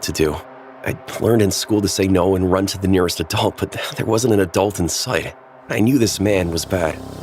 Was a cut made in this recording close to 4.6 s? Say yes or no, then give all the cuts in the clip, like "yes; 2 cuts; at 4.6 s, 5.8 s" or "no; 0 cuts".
no; 0 cuts